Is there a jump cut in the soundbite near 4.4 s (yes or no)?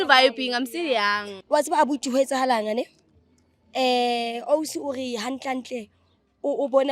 no